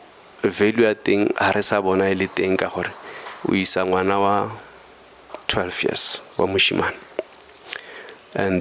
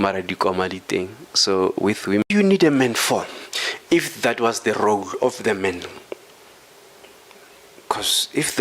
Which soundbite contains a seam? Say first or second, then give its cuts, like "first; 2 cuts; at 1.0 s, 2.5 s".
second; 1 cut; at 2.2 s